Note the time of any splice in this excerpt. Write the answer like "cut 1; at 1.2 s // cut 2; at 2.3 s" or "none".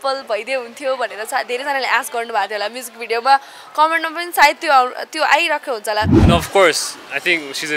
cut 1; at 6.3 s